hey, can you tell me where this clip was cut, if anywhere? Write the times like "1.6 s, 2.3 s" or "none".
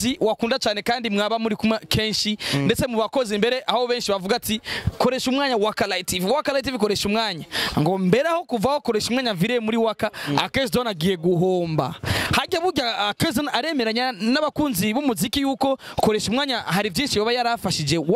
none